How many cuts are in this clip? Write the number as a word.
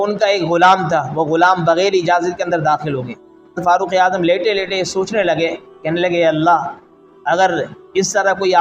two